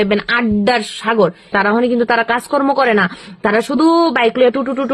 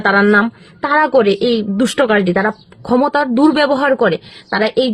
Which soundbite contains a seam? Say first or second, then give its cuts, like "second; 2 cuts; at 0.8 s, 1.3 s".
first; 1 cut; at 1.5 s